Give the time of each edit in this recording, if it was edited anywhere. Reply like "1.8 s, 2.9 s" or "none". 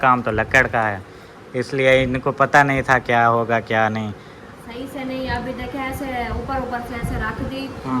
none